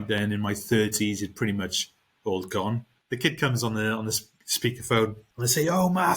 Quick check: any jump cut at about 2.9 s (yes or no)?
yes